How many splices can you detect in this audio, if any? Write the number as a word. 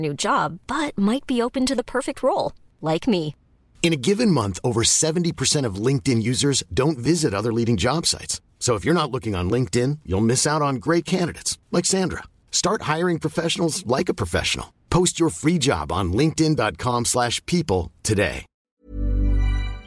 one